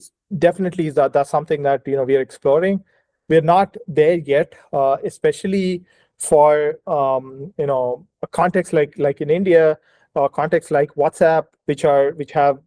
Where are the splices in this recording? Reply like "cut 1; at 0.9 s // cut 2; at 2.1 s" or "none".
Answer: none